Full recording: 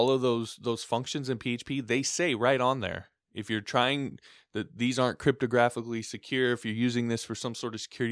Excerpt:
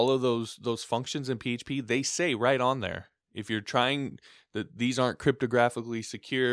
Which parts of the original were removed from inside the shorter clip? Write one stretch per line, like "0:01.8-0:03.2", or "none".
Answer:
none